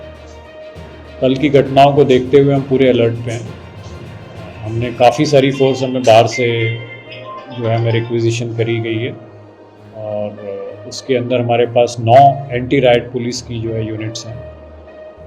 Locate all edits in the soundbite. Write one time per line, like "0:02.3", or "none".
0:01.2